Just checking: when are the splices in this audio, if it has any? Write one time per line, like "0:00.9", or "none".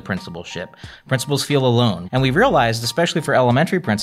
0:02.0